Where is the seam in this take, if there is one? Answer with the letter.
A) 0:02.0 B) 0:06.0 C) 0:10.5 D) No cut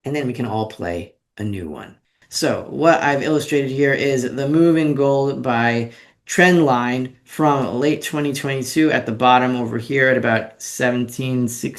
A